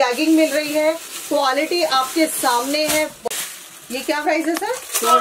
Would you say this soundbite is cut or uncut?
cut